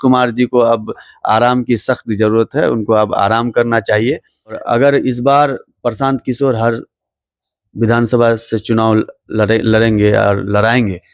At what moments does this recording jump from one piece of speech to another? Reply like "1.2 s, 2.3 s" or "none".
4.6 s